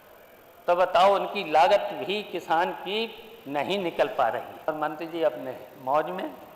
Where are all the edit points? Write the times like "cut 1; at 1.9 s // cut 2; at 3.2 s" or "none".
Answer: cut 1; at 4.7 s

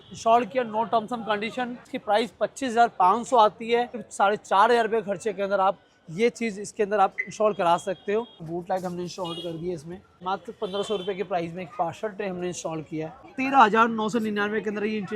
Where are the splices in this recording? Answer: cut 1; at 1.9 s // cut 2; at 4.0 s // cut 3; at 8.4 s // cut 4; at 10.1 s // cut 5; at 13.3 s

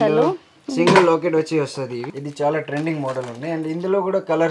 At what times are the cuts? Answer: cut 1; at 2.1 s

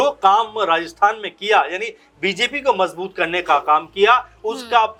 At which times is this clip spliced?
none

